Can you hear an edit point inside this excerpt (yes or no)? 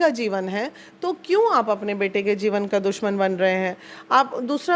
no